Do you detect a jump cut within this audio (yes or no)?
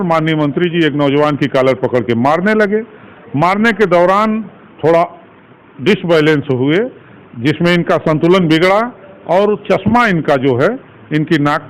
no